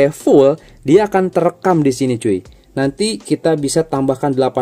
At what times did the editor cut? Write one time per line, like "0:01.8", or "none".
0:02.5